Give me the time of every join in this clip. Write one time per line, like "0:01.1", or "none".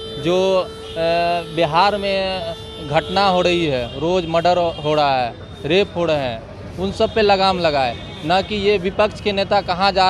none

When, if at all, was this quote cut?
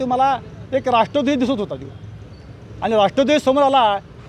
none

